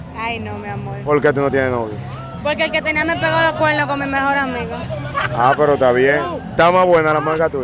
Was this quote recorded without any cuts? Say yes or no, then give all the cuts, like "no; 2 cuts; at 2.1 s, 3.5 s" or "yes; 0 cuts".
yes; 0 cuts